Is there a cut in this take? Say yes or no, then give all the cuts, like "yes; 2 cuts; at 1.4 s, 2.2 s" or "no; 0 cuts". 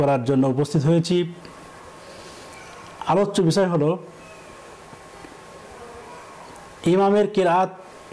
no; 0 cuts